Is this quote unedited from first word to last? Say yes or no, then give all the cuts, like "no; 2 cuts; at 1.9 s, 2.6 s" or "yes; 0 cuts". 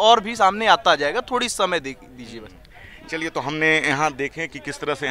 yes; 0 cuts